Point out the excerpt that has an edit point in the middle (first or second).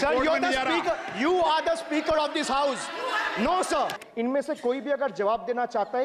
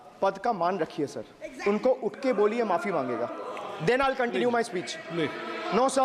first